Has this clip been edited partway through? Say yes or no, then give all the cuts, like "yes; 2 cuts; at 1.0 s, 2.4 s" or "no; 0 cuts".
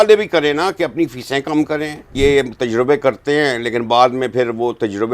yes; 1 cut; at 2.1 s